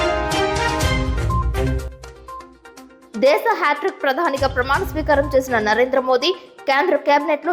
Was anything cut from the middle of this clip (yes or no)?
yes